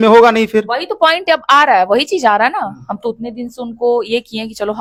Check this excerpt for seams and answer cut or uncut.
uncut